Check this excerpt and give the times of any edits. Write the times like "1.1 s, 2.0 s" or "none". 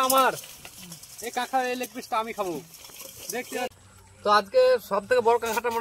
3.7 s